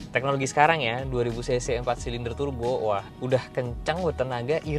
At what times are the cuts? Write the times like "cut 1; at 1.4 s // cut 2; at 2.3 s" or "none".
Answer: cut 1; at 3.1 s